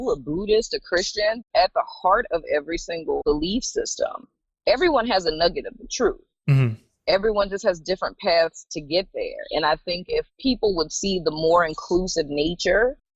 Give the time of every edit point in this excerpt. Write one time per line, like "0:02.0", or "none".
0:01.4
0:03.2
0:10.3